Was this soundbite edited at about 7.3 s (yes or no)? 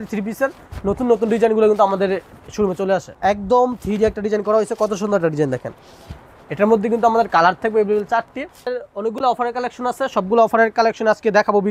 no